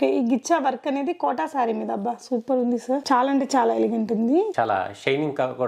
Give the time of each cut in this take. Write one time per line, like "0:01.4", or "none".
0:04.5